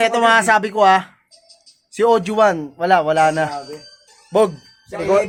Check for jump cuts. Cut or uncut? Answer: uncut